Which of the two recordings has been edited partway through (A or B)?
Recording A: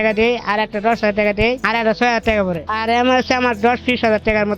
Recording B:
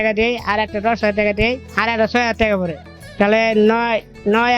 A